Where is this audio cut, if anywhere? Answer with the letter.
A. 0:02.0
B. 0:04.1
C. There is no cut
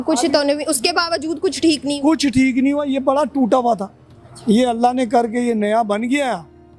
C